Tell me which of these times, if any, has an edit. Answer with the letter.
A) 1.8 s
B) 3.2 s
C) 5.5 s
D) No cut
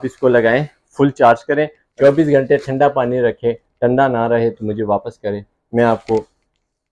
A